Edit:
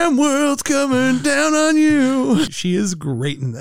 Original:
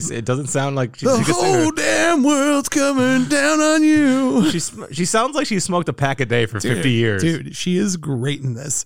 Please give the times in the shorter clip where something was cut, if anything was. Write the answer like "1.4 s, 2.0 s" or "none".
2.5 s